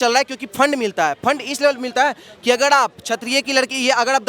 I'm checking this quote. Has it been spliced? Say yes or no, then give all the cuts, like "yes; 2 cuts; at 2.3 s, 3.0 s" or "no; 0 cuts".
no; 0 cuts